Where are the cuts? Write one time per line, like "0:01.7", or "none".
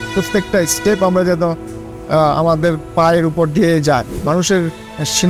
0:04.1